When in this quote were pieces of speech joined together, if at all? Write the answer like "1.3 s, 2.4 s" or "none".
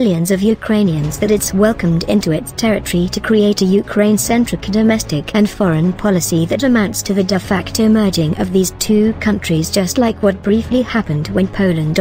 none